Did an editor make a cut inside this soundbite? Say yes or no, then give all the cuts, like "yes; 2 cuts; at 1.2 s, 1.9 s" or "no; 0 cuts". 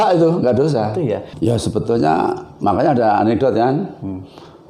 yes; 1 cut; at 1.3 s